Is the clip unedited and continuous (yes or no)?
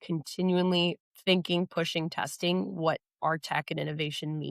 no